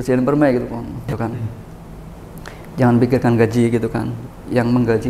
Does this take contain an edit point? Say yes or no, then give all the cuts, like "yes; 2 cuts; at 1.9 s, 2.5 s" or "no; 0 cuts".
yes; 1 cut; at 1.1 s